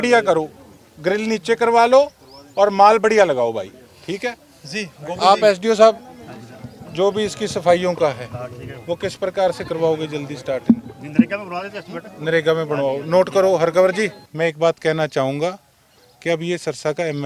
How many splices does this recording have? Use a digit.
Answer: 1